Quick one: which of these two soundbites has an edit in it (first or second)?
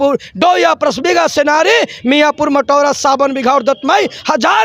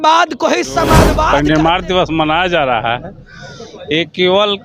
second